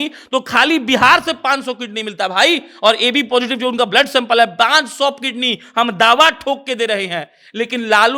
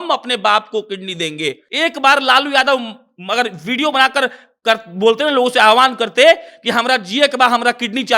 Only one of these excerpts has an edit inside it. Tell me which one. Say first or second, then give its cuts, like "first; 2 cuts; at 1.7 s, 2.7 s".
second; 1 cut; at 1.6 s